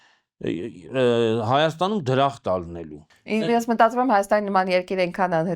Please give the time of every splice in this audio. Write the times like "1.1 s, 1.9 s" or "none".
3.1 s